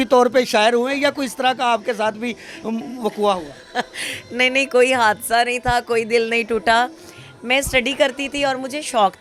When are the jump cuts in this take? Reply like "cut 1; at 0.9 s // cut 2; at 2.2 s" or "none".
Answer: none